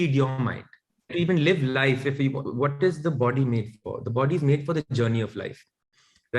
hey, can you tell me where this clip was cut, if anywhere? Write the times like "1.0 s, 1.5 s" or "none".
1.1 s